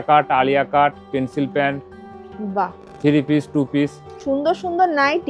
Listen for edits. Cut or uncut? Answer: cut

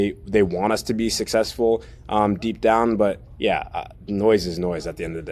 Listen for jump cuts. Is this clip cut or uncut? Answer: uncut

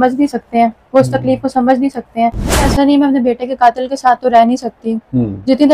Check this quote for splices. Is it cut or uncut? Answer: cut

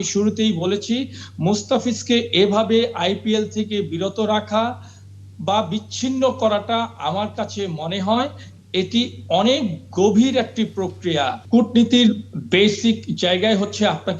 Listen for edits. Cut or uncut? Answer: cut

